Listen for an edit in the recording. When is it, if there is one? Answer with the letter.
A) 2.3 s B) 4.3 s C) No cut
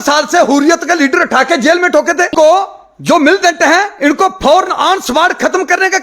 A